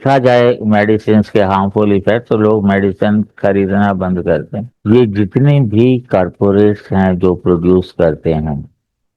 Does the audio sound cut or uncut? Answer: cut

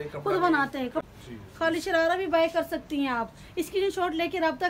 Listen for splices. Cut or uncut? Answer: cut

